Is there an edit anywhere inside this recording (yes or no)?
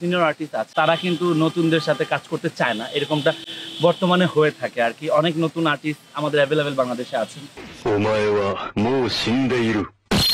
no